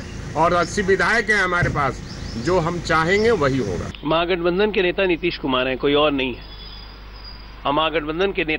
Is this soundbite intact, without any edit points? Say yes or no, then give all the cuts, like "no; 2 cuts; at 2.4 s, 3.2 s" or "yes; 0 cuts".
no; 1 cut; at 3.8 s